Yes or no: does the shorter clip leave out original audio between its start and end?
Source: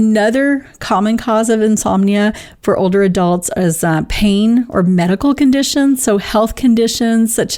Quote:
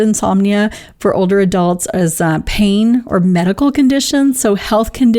no